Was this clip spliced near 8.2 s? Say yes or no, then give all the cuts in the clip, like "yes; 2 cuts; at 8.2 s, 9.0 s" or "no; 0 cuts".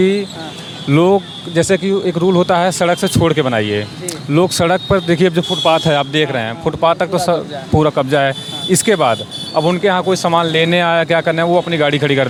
no; 0 cuts